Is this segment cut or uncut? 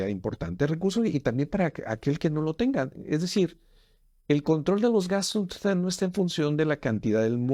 uncut